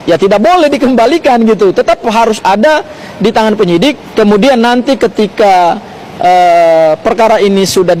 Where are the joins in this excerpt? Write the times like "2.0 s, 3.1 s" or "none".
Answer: none